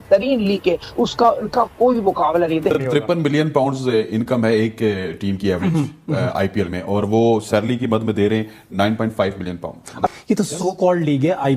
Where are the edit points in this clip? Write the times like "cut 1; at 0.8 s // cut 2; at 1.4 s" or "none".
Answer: cut 1; at 2.7 s // cut 2; at 10.1 s